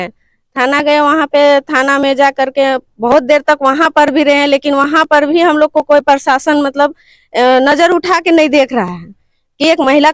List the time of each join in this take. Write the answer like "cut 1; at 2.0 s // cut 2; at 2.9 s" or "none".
none

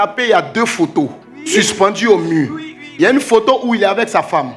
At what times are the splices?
none

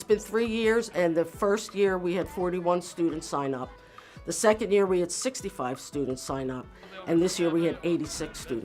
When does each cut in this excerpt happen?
none

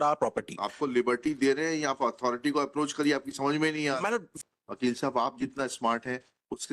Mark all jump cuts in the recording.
cut 1; at 4.3 s

